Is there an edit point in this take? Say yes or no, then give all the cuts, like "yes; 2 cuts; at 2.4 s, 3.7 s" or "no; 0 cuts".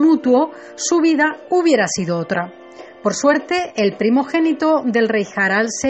no; 0 cuts